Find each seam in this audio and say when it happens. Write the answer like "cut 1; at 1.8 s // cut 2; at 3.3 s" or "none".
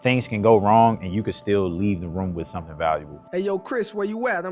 cut 1; at 3.2 s